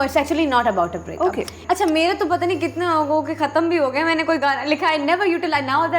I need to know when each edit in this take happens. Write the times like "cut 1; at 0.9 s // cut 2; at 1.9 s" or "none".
cut 1; at 1.5 s